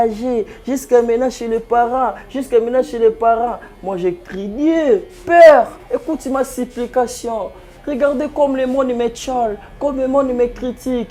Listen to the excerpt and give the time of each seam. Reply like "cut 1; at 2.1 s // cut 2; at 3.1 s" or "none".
none

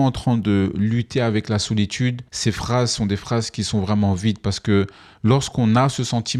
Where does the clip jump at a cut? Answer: none

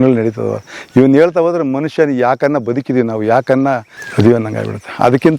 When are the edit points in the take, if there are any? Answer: cut 1; at 4.0 s

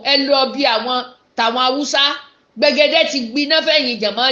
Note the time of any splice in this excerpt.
none

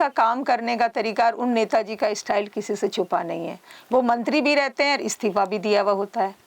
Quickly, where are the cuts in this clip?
none

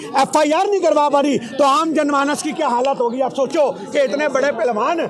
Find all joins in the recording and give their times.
none

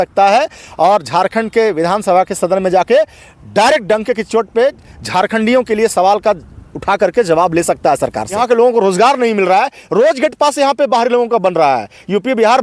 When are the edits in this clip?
cut 1; at 8.3 s

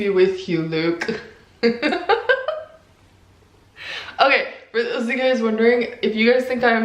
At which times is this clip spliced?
cut 1; at 1.9 s

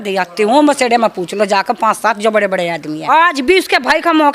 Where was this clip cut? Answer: cut 1; at 2.9 s

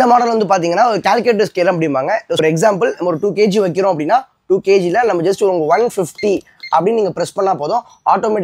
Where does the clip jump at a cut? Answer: cut 1; at 2.4 s

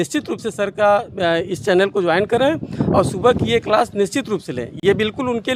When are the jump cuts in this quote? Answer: none

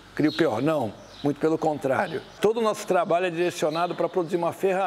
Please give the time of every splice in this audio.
cut 1; at 2.3 s

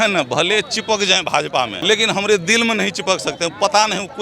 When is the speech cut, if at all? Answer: cut 1; at 1.8 s

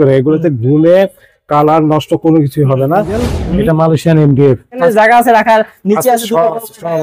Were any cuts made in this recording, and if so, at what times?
cut 1; at 3.3 s // cut 2; at 4.8 s

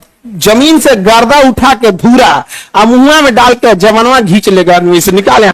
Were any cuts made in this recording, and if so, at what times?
none

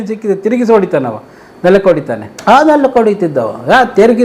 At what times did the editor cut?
cut 1; at 2.3 s

